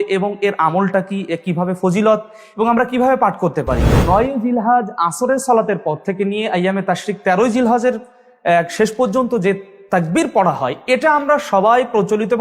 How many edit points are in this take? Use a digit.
1